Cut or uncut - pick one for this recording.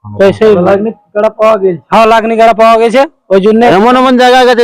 cut